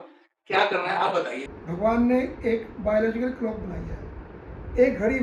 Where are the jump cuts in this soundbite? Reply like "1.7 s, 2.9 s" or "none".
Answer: 1.4 s